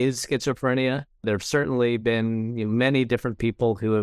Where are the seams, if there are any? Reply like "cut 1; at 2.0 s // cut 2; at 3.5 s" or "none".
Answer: none